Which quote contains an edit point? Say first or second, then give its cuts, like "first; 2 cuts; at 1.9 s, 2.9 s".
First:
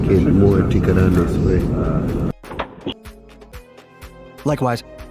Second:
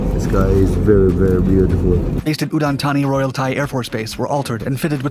second; 1 cut; at 2.1 s